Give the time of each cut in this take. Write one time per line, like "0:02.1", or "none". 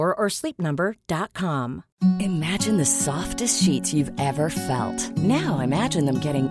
0:01.8